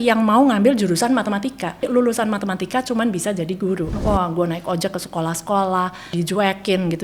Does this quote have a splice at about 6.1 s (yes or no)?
yes